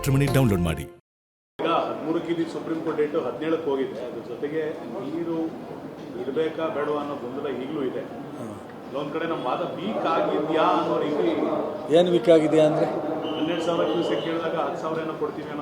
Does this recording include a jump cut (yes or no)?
yes